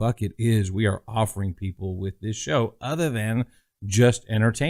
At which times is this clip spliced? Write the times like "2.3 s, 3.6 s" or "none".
none